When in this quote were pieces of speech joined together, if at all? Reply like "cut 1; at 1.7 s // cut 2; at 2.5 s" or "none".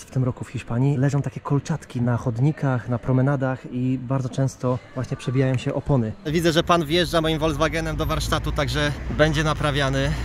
cut 1; at 1.0 s // cut 2; at 4.9 s // cut 3; at 6.3 s